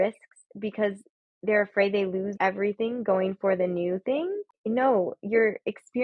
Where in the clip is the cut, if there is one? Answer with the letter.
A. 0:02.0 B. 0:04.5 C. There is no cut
B